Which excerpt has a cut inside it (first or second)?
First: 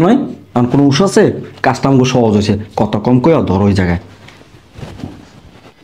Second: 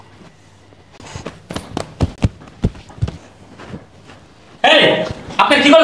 second